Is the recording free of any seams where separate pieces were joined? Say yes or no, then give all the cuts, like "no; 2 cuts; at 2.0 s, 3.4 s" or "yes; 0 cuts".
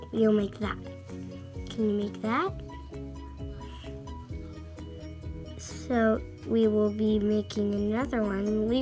no; 3 cuts; at 2.6 s, 4.2 s, 5.8 s